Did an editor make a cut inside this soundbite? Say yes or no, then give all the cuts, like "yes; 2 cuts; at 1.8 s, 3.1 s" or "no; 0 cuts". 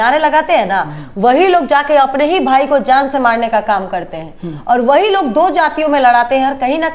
no; 0 cuts